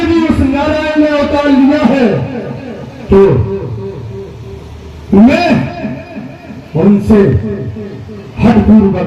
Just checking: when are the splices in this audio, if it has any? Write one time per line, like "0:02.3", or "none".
none